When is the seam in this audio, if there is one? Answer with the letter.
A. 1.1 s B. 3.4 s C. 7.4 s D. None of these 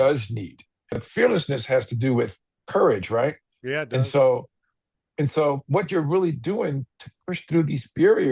A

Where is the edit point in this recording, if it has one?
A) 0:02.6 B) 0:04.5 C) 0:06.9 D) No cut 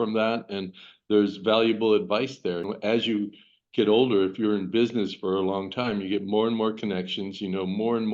A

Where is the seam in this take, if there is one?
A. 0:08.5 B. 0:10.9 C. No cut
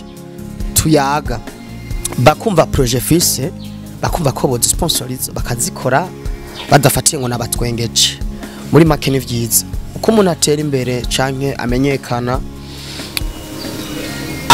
C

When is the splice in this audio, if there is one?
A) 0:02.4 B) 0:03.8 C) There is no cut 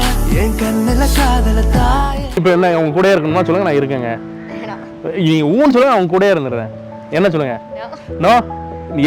A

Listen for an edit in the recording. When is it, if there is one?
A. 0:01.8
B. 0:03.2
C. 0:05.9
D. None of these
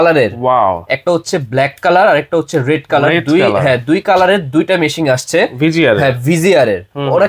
D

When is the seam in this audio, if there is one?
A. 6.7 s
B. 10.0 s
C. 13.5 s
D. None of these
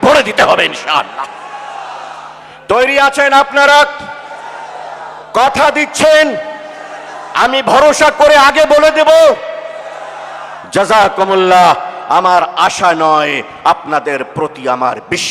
D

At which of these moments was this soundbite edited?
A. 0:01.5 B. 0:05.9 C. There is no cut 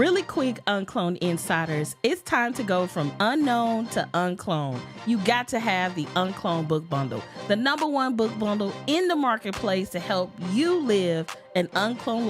A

